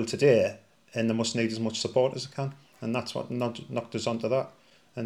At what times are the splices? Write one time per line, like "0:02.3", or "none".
none